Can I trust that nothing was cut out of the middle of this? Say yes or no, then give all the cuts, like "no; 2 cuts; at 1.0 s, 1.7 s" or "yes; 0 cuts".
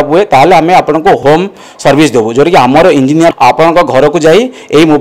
no; 2 cuts; at 1.2 s, 3.3 s